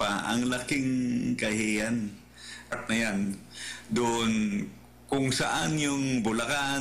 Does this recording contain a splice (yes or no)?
yes